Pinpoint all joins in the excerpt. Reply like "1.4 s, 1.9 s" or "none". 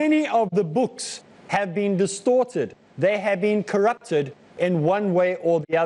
1.9 s